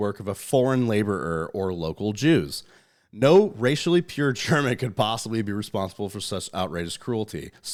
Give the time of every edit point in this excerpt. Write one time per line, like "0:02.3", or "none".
none

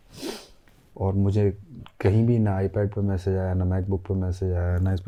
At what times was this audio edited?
none

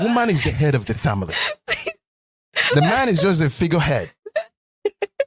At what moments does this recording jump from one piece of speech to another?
none

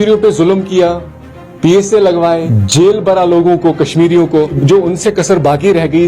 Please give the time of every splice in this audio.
0:02.5
0:04.6

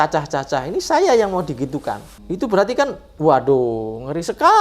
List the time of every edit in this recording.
0:02.2

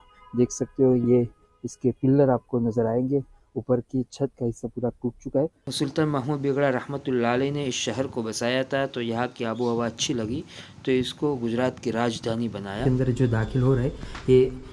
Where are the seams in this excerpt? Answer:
0:05.6
0:12.8

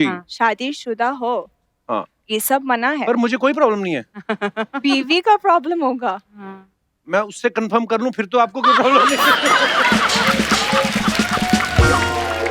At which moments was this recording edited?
none

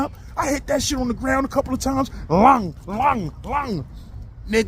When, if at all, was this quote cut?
none

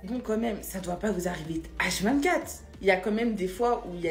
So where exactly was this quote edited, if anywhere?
0:03.0

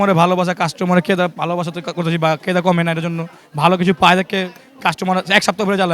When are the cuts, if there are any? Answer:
none

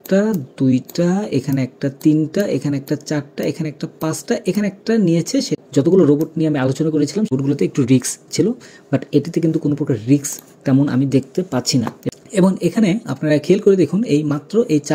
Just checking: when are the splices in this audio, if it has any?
0:05.6
0:07.4
0:12.0

